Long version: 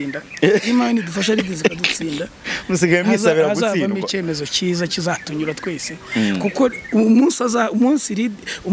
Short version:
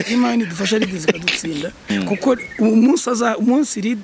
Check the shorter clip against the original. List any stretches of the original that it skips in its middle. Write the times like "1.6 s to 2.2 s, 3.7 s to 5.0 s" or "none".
2.5 s to 6.2 s